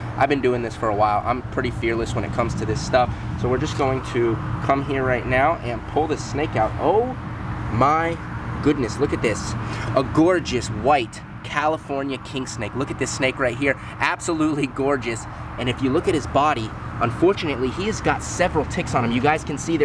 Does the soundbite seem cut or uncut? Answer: uncut